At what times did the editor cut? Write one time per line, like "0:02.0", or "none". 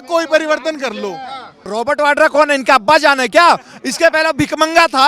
0:01.6